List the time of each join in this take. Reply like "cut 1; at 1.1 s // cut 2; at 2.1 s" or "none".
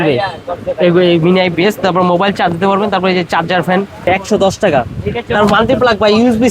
cut 1; at 4.1 s